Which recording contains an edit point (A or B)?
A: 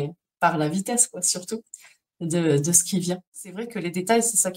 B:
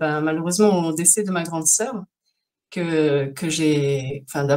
A